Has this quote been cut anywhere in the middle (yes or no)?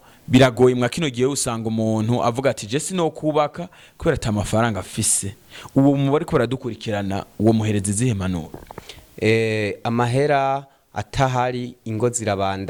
no